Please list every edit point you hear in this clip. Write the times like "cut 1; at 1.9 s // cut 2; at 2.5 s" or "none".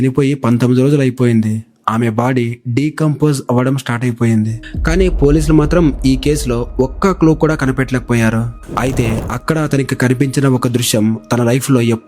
cut 1; at 4.6 s // cut 2; at 8.6 s